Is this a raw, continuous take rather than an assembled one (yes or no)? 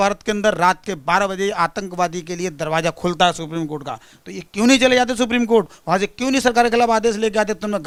yes